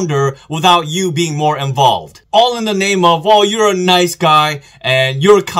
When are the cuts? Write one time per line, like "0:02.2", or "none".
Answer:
0:02.1